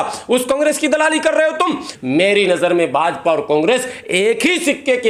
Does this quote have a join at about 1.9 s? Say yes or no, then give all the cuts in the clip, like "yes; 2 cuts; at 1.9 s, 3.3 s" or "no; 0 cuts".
yes; 1 cut; at 1.9 s